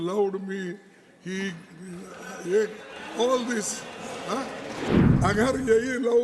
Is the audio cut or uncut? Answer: cut